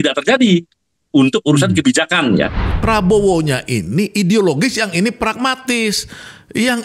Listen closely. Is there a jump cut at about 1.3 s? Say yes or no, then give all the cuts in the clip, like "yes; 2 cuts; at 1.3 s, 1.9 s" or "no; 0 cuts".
no; 1 cut; at 2.6 s